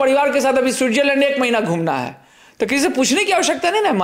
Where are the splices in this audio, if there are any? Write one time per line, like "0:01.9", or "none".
none